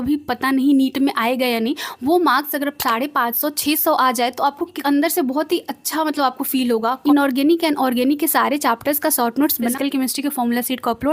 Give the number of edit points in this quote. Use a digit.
3